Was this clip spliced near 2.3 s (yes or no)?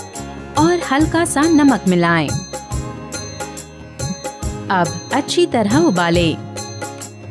yes